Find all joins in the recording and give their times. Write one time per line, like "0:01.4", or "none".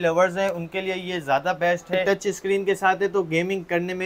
0:02.0